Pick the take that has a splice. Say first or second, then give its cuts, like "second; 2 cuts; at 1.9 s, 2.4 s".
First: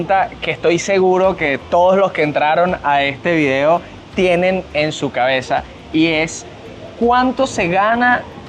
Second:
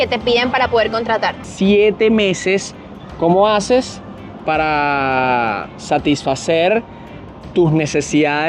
second; 1 cut; at 1.4 s